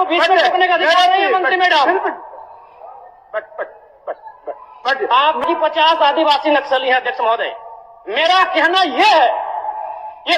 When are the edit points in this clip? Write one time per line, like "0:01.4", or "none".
0:05.4